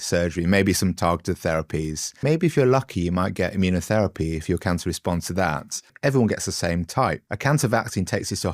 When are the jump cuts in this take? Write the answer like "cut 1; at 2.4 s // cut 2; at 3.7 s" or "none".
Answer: cut 1; at 2.1 s // cut 2; at 5.9 s // cut 3; at 7.3 s